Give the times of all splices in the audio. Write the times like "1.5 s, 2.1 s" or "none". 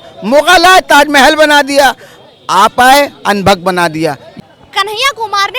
none

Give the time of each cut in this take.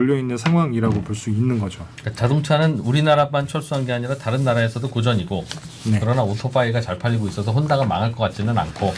none

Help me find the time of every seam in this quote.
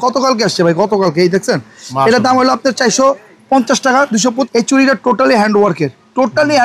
4.5 s

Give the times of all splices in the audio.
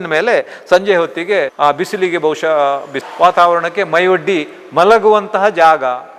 1.5 s, 3.0 s

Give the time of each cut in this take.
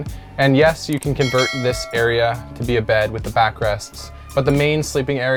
none

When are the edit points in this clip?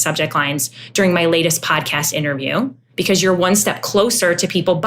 2.8 s

